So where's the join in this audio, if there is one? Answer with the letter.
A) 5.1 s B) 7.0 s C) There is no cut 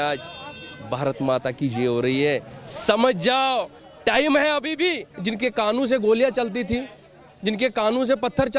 A